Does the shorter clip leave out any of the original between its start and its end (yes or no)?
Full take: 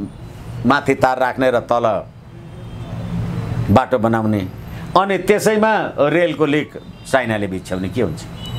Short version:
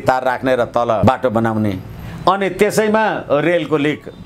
yes